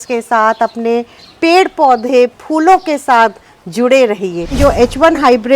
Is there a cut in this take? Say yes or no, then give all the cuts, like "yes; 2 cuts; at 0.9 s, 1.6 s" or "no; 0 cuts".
yes; 1 cut; at 4.6 s